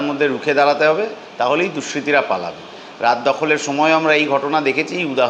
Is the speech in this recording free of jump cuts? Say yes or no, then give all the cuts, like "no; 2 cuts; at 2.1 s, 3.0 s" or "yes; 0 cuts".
yes; 0 cuts